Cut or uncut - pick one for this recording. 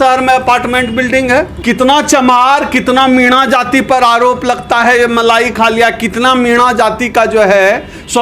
cut